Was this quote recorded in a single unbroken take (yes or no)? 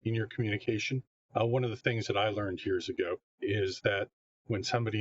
no